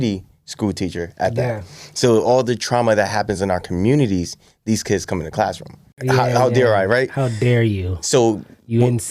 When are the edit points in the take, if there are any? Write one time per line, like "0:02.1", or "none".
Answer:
0:05.9